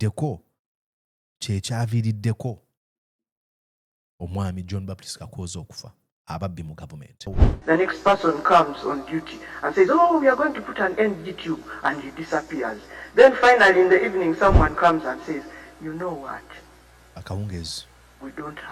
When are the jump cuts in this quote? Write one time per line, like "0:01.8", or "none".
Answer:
0:07.4